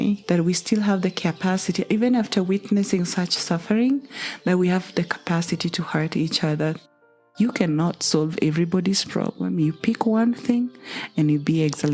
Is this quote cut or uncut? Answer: cut